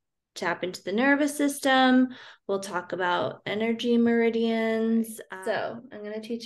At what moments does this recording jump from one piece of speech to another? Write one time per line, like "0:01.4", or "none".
0:05.2